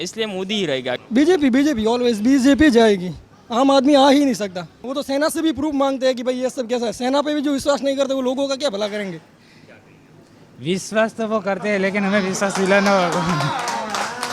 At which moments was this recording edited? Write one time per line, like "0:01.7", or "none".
0:01.0
0:04.8